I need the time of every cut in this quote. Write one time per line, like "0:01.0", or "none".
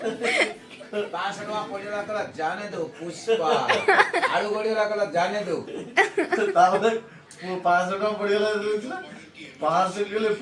none